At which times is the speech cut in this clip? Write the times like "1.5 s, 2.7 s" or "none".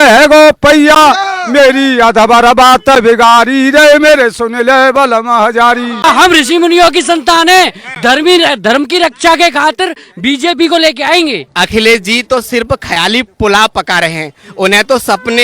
6.0 s, 11.4 s